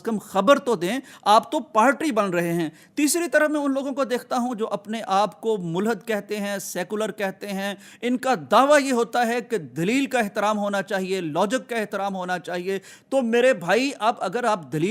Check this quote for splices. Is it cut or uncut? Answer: uncut